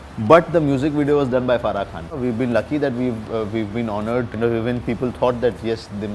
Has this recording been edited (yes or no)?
yes